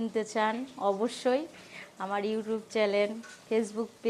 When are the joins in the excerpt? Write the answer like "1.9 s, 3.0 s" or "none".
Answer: none